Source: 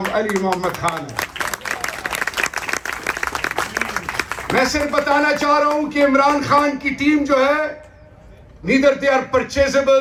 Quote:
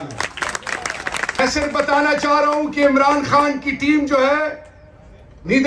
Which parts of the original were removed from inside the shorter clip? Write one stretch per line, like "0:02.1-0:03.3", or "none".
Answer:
0:02.4-0:04.6